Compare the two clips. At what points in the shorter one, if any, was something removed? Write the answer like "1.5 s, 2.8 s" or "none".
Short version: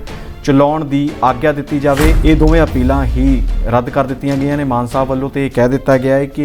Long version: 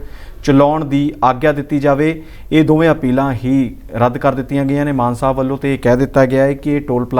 2.2 s